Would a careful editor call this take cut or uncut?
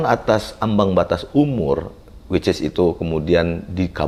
uncut